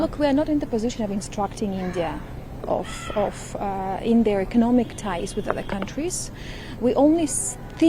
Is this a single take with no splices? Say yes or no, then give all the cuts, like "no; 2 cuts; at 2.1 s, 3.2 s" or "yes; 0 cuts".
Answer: yes; 0 cuts